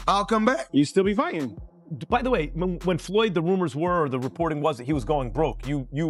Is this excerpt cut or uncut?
cut